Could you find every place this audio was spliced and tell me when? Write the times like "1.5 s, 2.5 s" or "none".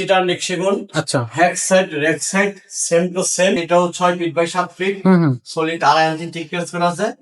3.6 s